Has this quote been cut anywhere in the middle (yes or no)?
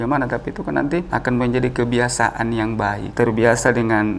yes